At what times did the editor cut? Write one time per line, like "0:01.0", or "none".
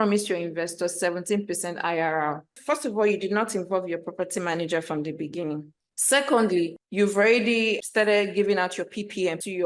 none

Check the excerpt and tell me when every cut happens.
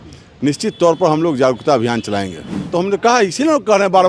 0:02.7

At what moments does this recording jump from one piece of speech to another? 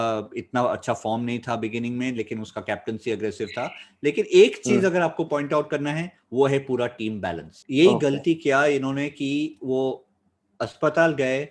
0:07.5

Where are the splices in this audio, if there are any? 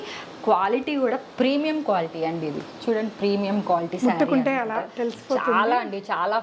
none

